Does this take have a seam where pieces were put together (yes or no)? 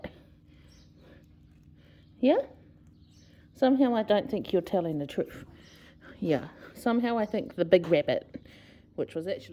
no